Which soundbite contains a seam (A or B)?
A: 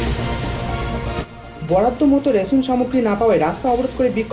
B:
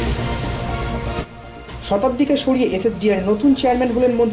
A